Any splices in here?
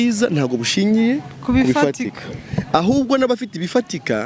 no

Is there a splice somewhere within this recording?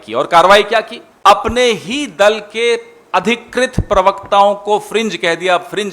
yes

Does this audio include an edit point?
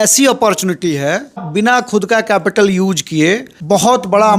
yes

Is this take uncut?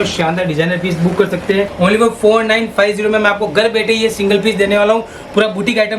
no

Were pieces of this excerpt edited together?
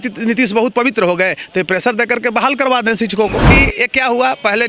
yes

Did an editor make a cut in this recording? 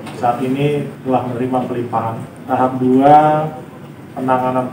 yes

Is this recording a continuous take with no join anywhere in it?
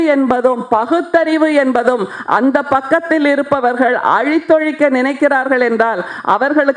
yes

